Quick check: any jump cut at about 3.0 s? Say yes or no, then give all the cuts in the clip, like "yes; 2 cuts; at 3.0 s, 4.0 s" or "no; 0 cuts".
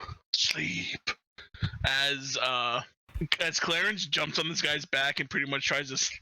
yes; 1 cut; at 3.0 s